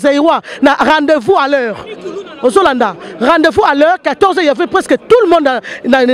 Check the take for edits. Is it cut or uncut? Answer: uncut